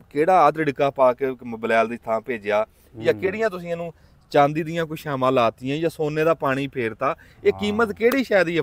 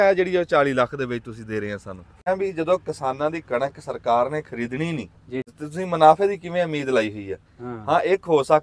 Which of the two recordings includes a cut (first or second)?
second